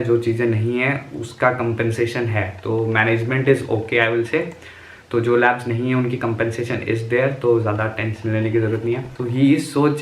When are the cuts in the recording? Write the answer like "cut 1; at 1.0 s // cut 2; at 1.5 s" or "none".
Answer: cut 1; at 9.1 s